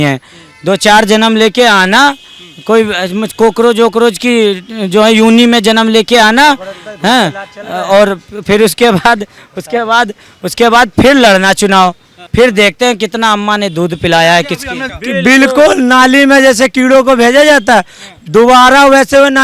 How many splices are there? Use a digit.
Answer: 2